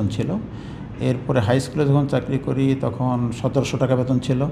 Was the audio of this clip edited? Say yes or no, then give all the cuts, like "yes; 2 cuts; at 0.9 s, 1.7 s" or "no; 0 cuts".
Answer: no; 0 cuts